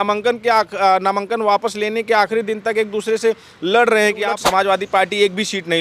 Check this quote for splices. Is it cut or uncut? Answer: cut